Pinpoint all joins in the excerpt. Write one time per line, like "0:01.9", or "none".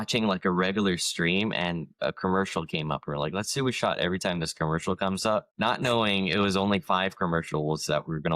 0:05.5